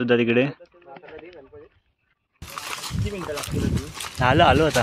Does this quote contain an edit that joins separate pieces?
yes; 1 cut; at 2.5 s

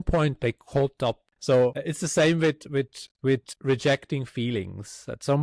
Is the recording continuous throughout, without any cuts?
no; 3 cuts; at 1.3 s, 1.8 s, 3.5 s

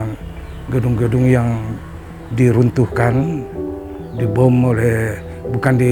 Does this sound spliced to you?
no; 0 cuts

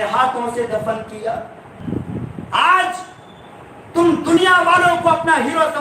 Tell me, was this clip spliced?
yes; 1 cut; at 1.8 s

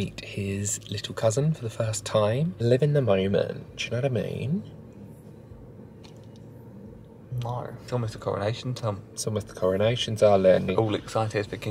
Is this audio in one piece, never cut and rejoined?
no; 3 cuts; at 2.5 s, 7.8 s, 10.7 s

